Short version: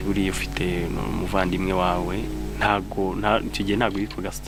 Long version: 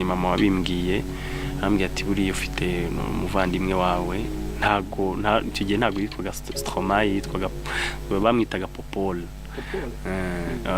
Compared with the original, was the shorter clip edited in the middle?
no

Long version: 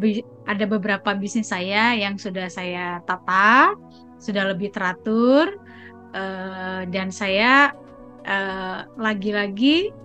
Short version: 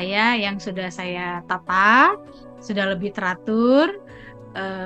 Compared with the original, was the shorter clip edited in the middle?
no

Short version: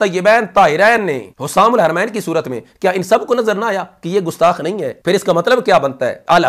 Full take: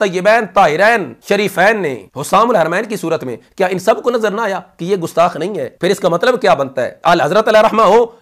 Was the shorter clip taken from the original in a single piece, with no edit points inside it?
no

